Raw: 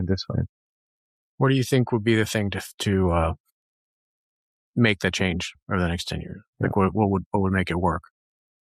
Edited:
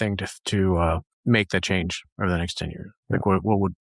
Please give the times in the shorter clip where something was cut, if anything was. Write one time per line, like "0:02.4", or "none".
0:01.1

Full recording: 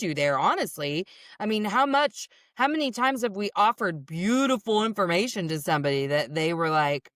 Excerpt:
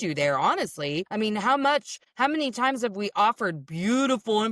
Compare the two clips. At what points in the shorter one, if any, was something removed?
0:01.1
0:02.0

